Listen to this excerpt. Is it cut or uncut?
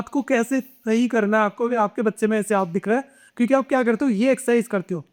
uncut